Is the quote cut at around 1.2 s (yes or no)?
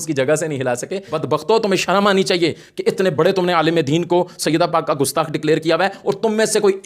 yes